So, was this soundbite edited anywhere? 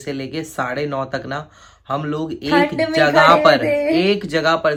no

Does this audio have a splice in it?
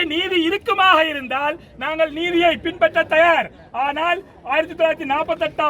no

